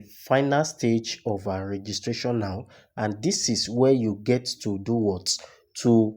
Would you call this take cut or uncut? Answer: uncut